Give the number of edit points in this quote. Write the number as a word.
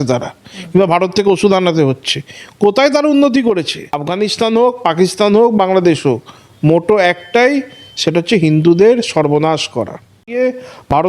two